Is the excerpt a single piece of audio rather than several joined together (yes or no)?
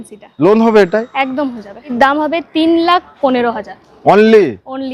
no